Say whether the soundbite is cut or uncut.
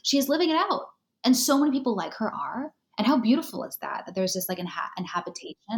uncut